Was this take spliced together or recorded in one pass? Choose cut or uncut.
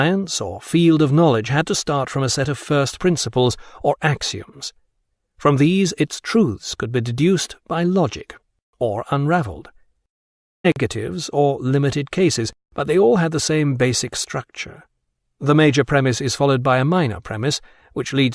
uncut